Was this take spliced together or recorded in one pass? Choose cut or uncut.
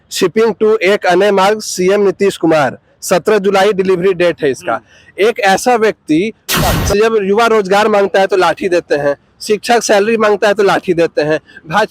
cut